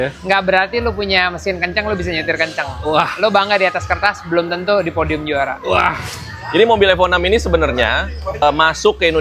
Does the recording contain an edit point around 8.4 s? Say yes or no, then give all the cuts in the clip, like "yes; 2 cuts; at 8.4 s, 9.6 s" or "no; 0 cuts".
yes; 2 cuts; at 6.0 s, 8.4 s